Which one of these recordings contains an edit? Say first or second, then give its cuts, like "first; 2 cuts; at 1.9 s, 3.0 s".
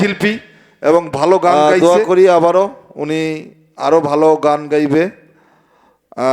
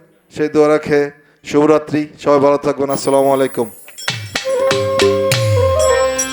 first; 1 cut; at 1.5 s